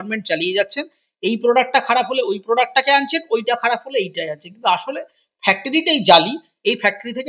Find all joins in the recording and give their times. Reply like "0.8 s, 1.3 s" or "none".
none